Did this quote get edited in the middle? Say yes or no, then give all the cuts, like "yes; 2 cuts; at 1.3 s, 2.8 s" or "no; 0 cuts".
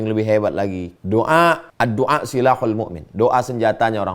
yes; 2 cuts; at 0.9 s, 1.7 s